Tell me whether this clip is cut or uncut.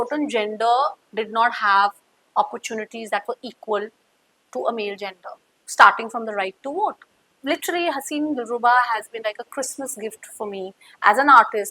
cut